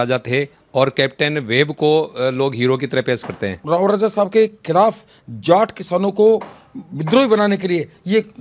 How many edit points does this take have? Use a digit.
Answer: 1